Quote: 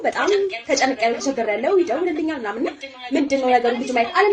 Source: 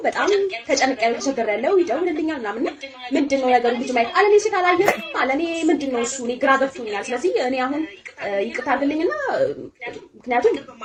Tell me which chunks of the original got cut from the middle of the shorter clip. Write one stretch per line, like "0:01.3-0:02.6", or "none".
none